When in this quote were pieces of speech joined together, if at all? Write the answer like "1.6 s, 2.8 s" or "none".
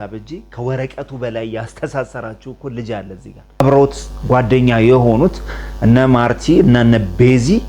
3.6 s